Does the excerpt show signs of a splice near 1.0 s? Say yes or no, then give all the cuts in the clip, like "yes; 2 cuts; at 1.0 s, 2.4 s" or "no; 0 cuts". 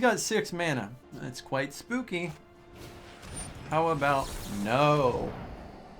yes; 1 cut; at 1.0 s